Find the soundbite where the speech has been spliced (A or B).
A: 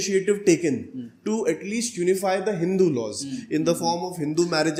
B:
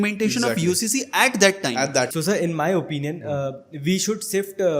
B